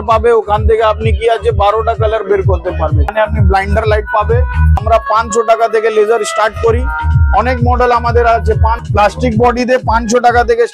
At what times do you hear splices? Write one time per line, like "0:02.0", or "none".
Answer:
0:03.1
0:04.8
0:08.8